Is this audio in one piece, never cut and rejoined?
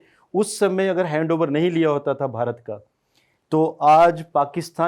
yes; 0 cuts

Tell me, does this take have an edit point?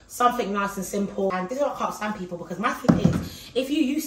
yes; 1 cut; at 1.3 s

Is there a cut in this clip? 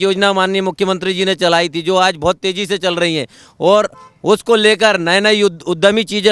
no; 0 cuts

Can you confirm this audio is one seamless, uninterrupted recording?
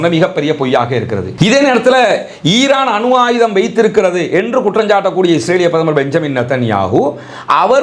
no; 1 cut; at 1.3 s

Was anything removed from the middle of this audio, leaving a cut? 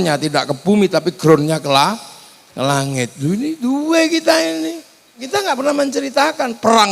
yes; 1 cut; at 5.3 s

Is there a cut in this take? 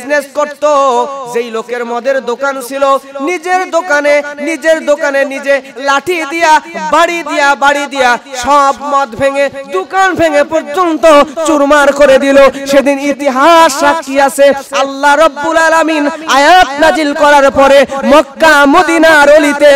no; 0 cuts

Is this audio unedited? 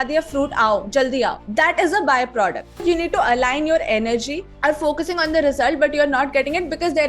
no; 3 cuts; at 1.4 s, 2.8 s, 4.4 s

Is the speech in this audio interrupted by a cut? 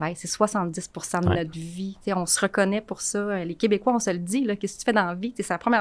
no; 0 cuts

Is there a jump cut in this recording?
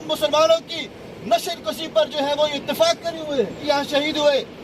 yes; 1 cut; at 3.6 s

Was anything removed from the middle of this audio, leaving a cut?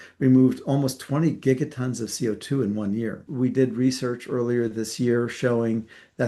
yes; 1 cut; at 3.3 s

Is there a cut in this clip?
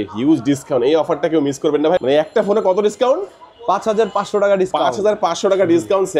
yes; 1 cut; at 2.0 s

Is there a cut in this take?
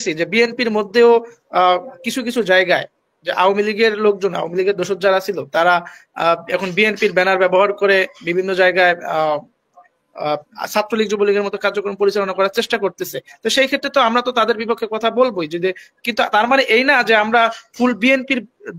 no; 0 cuts

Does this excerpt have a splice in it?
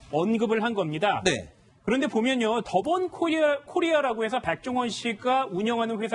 no; 0 cuts

